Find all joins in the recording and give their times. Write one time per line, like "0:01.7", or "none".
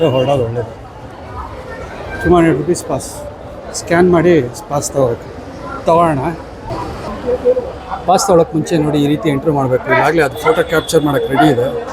0:06.7